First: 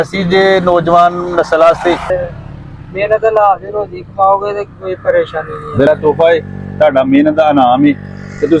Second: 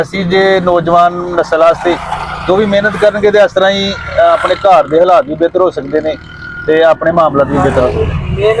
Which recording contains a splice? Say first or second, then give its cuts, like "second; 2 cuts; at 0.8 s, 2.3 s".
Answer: first; 2 cuts; at 2.1 s, 5.9 s